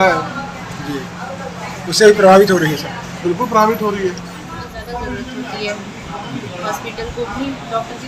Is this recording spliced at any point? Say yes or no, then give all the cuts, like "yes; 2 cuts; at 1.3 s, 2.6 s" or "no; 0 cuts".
yes; 1 cut; at 4.7 s